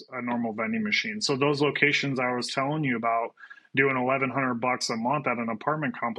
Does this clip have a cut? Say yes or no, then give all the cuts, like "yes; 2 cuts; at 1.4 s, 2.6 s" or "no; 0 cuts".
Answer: no; 0 cuts